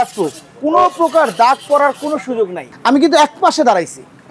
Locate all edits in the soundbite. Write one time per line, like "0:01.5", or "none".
0:02.7

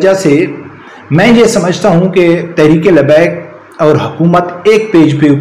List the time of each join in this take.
none

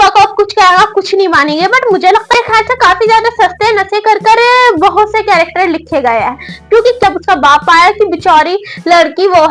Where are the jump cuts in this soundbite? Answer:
0:02.3
0:07.0

